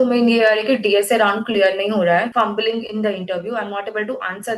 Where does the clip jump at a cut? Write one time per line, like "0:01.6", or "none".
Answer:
0:02.3

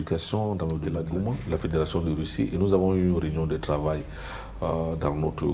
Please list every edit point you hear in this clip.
0:01.0

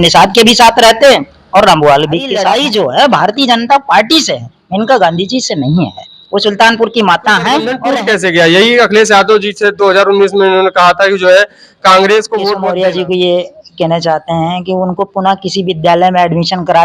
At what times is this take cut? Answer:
0:02.3
0:07.8
0:12.6

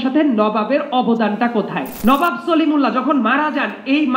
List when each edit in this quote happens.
0:01.9

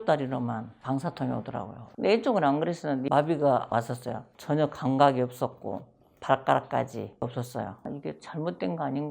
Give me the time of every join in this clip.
0:03.1
0:03.7
0:07.9

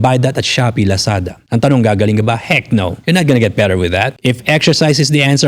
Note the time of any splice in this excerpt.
0:01.3
0:03.0
0:04.1

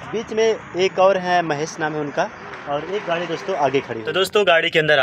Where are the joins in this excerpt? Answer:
0:03.9

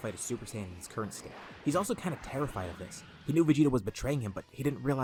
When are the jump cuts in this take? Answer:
none

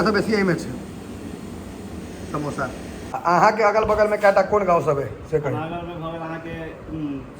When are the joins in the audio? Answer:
0:03.1

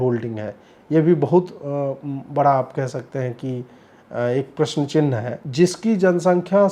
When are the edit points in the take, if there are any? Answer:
0:05.4

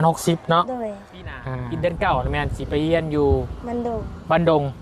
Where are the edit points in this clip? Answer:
0:01.7

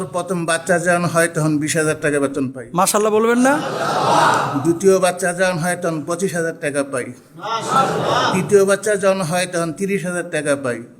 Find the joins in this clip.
none

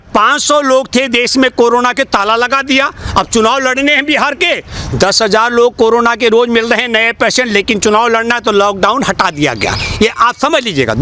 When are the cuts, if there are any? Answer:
none

